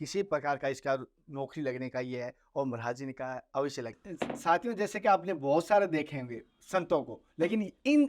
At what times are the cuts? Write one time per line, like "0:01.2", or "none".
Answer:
0:04.0